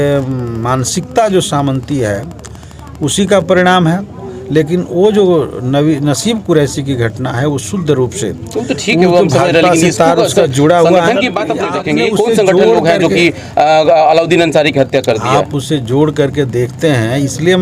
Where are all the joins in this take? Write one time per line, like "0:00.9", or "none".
0:11.7